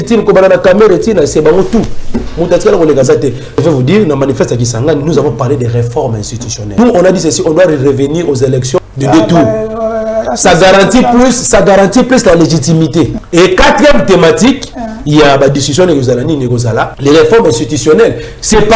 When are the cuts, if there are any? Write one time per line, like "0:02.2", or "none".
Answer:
0:03.6
0:06.8
0:08.9
0:13.2
0:16.9